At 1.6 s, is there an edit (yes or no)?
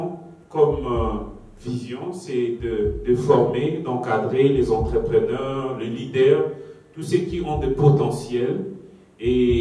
no